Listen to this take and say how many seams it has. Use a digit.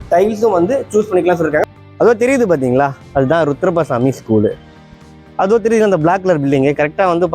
2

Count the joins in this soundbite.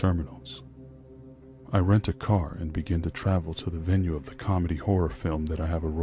1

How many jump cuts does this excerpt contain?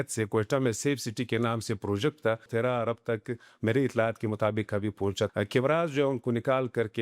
2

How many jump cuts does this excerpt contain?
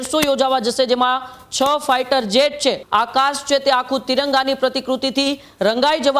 1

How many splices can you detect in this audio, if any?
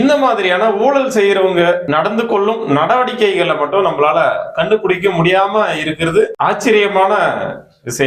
0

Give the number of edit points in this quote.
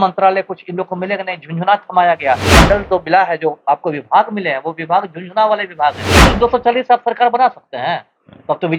2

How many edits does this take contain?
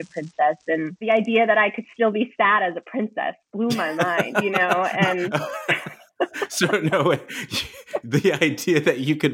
1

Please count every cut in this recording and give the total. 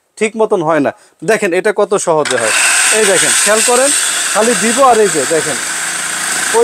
0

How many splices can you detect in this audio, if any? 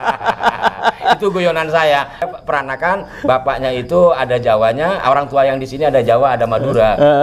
1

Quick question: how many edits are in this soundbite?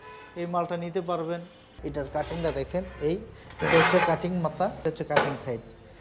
2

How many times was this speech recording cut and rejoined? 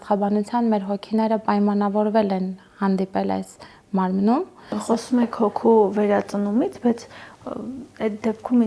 1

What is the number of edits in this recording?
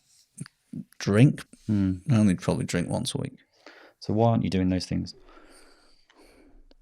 1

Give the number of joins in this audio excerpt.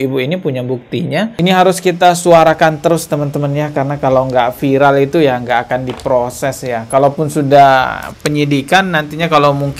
1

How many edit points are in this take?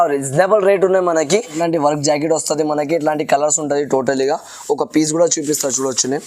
1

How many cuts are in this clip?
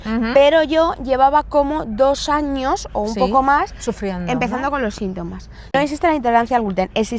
1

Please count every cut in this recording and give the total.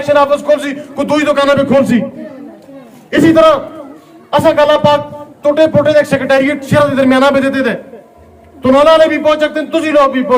0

